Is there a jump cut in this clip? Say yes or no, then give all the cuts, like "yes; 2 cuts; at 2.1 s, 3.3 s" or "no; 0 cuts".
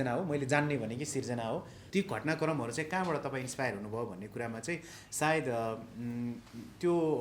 yes; 1 cut; at 1.8 s